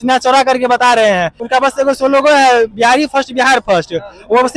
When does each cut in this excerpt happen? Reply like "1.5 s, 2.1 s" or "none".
1.3 s